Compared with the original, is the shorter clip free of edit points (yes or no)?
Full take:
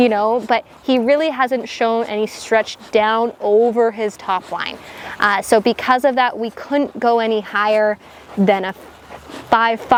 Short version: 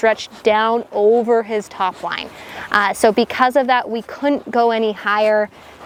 yes